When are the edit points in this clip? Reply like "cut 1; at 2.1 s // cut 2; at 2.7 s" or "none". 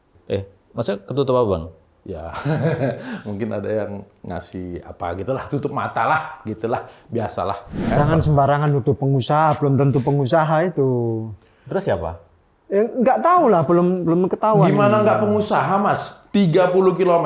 cut 1; at 7.9 s